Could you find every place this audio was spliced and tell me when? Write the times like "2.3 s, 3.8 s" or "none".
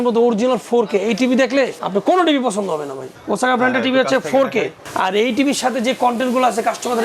1.8 s, 3.1 s, 4.8 s